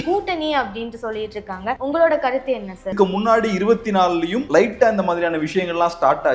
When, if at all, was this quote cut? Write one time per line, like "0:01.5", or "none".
0:01.8
0:02.9
0:04.4